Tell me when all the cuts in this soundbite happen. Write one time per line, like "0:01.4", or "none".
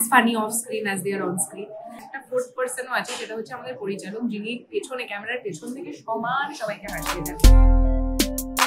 0:02.1
0:07.2